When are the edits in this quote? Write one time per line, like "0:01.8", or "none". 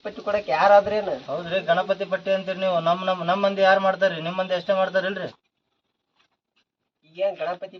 none